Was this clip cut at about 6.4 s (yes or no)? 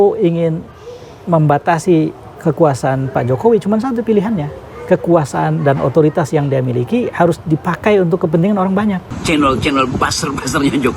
no